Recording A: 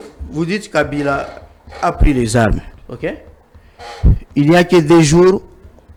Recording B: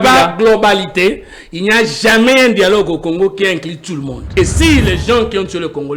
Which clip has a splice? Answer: B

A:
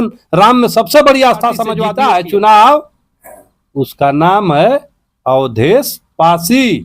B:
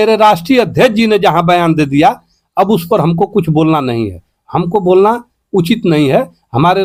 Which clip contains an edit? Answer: A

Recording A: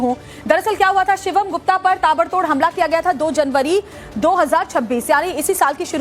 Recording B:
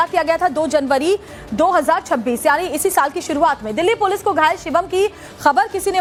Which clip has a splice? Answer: A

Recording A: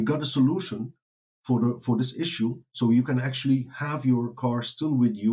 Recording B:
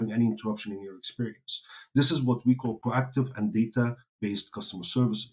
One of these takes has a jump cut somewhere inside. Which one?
B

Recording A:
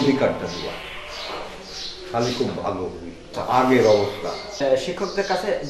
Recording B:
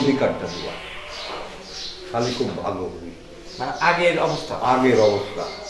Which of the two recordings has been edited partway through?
A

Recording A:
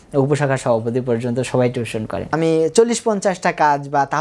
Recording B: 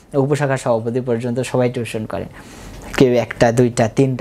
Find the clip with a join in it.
A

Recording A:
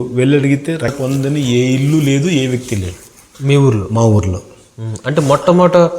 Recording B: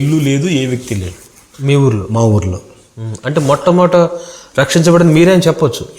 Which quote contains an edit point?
A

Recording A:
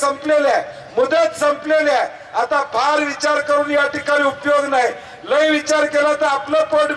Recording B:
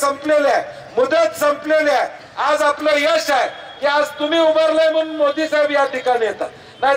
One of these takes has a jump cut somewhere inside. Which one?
B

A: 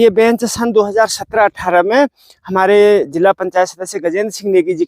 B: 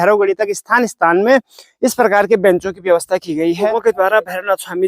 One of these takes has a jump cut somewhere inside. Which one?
B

